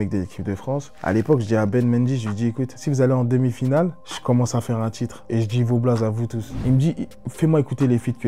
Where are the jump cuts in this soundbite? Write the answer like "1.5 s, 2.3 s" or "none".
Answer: 0.9 s, 2.8 s, 4.1 s, 5.1 s, 6.5 s